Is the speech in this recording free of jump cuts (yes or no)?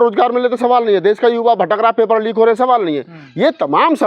yes